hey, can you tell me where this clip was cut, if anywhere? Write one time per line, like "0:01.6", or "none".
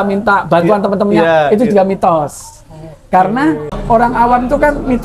0:03.7